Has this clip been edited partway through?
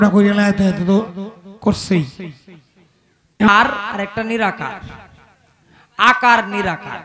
yes; 1 cut; at 3.5 s

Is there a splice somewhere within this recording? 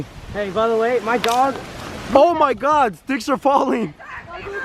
no; 0 cuts

